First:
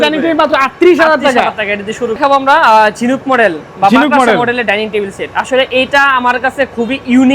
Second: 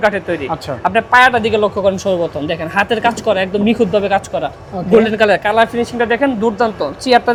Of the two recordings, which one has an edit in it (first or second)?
first